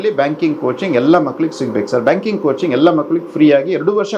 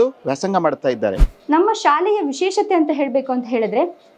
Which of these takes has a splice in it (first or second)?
second